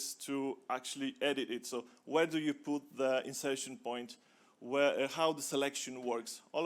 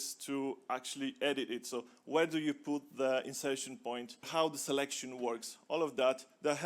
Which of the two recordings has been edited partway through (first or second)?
second